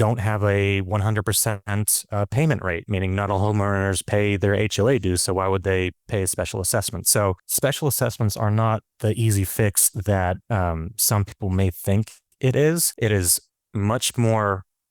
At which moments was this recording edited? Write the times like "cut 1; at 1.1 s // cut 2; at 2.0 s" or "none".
cut 1; at 3.3 s // cut 2; at 7.4 s